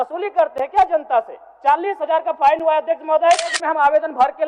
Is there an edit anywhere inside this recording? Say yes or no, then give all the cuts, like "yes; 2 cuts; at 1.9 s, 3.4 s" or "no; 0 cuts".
yes; 1 cut; at 3.6 s